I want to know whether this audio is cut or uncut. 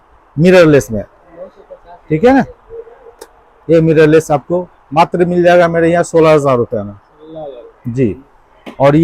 uncut